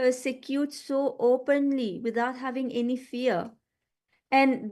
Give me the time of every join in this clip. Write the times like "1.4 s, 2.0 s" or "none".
1.0 s, 2.6 s